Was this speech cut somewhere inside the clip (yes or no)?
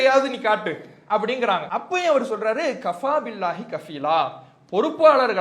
yes